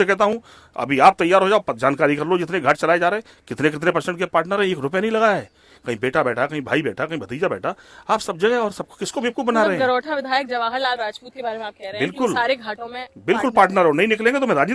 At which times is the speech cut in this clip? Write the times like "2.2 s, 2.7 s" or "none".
none